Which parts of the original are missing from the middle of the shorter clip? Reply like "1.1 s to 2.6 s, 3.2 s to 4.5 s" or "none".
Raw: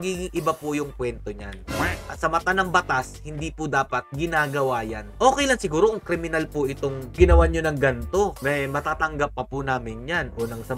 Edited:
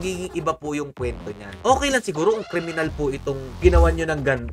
1.5 s to 5.0 s